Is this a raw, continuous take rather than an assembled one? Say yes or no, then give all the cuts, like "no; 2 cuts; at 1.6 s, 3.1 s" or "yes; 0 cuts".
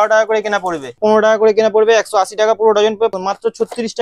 no; 2 cuts; at 1.0 s, 3.1 s